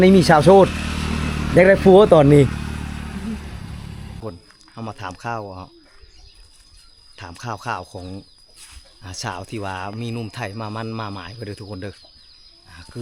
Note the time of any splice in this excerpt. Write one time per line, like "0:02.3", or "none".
0:04.2

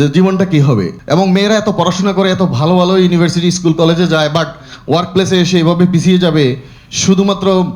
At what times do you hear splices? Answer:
0:00.9

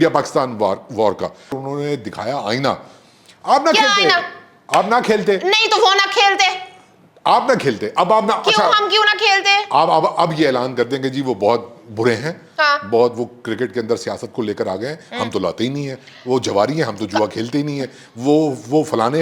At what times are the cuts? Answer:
0:01.6

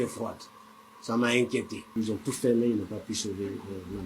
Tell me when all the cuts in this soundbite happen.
0:01.8

